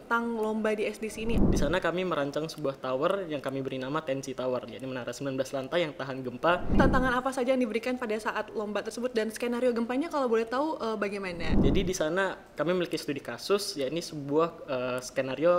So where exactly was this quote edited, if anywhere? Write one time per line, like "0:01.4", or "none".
0:01.4
0:06.8
0:11.5